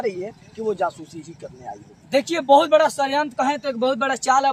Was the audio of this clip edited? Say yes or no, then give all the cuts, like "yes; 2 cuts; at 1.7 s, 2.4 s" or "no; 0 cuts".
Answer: no; 0 cuts